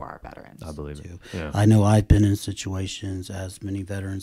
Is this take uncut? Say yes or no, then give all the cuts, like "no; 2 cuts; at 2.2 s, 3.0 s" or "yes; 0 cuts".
no; 1 cut; at 1.2 s